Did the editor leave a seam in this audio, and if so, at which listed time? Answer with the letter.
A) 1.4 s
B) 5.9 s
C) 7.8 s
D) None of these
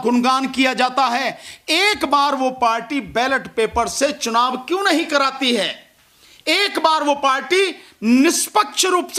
D